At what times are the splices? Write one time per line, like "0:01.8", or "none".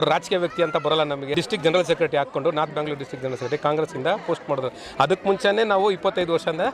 0:01.3